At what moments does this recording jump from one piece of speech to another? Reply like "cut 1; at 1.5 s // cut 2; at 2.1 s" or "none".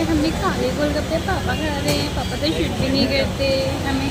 none